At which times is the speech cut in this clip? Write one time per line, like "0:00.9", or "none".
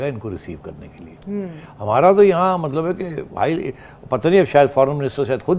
none